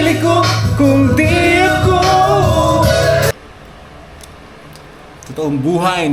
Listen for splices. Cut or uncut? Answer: cut